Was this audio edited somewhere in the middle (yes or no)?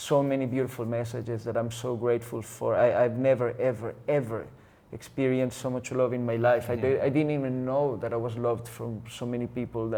no